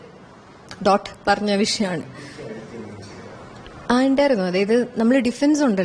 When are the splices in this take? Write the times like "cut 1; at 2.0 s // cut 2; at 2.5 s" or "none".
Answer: none